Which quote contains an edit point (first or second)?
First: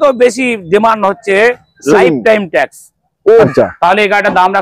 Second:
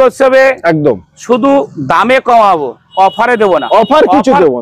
first